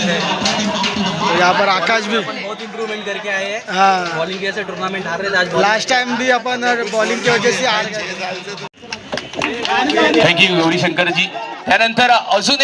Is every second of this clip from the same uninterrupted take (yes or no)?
no